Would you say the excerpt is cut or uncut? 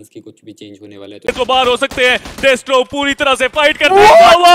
cut